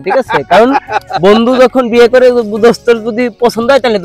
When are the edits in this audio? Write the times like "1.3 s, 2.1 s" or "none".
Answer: none